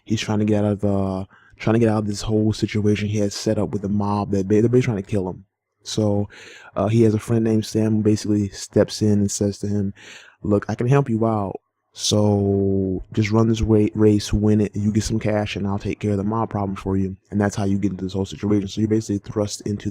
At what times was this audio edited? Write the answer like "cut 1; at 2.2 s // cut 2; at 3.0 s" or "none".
cut 1; at 15.0 s